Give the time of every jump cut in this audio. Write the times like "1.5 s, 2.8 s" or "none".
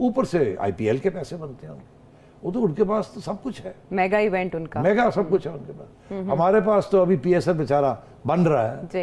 none